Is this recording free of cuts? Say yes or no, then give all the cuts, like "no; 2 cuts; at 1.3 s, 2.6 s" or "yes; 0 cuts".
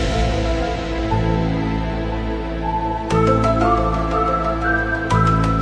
yes; 0 cuts